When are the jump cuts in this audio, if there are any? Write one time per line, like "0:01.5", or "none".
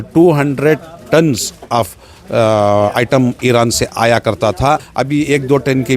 0:04.9